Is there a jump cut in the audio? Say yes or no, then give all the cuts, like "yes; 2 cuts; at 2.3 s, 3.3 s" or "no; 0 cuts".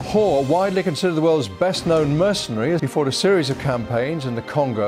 yes; 1 cut; at 2.8 s